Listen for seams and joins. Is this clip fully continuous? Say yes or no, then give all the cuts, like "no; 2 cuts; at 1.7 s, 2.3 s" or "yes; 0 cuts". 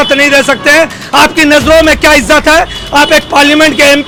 yes; 0 cuts